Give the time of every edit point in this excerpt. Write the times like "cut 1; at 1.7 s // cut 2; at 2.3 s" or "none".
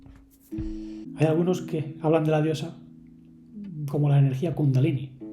cut 1; at 1.1 s